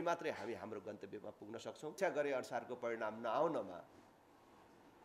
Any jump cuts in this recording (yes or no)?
yes